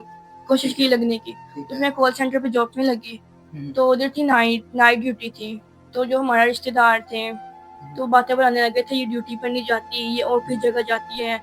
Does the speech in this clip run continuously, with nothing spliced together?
yes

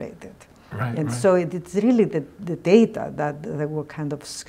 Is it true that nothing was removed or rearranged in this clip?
yes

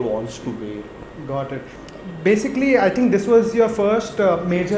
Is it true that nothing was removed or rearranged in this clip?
no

